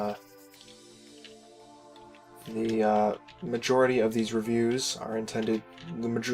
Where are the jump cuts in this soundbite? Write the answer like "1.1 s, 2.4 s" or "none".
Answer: 4.5 s

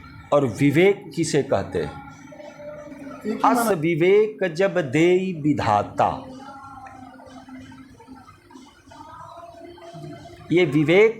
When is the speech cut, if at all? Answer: 3.7 s

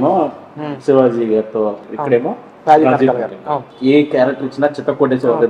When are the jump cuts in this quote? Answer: 1.9 s, 3.7 s

